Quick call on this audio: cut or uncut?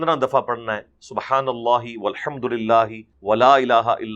cut